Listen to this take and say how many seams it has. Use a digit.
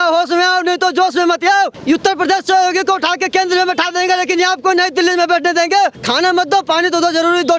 2